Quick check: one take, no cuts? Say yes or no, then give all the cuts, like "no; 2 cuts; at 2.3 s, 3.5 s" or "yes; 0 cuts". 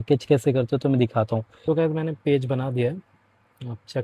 no; 1 cut; at 1.5 s